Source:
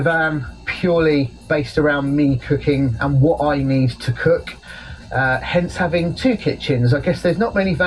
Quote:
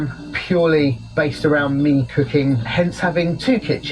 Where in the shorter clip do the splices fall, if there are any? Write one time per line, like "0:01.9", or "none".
0:02.6